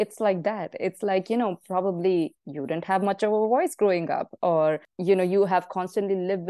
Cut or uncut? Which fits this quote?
cut